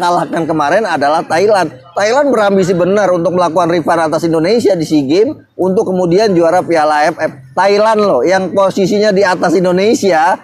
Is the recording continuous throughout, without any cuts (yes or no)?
yes